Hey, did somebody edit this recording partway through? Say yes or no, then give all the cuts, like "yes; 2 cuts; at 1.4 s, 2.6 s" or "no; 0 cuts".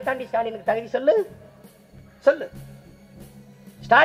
no; 0 cuts